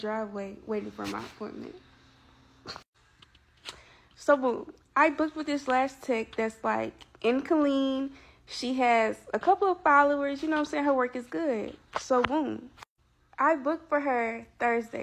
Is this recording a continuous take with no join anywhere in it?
yes; 0 cuts

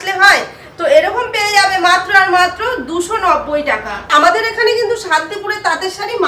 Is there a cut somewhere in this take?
yes; 1 cut; at 4.1 s

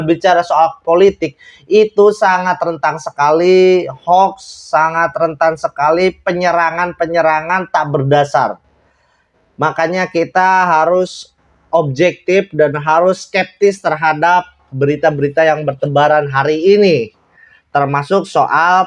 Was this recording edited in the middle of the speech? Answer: no; 0 cuts

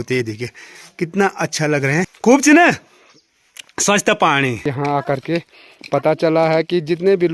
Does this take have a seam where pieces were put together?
yes; 2 cuts; at 2.1 s, 4.7 s

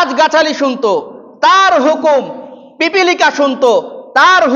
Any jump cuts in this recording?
no; 0 cuts

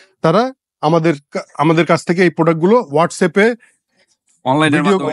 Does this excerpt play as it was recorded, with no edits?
yes; 0 cuts

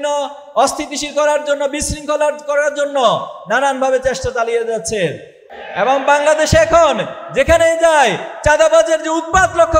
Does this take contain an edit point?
yes; 1 cut; at 5.4 s

